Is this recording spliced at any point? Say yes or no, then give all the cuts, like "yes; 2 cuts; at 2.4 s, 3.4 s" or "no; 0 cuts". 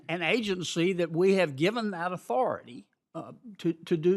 yes; 1 cut; at 2.8 s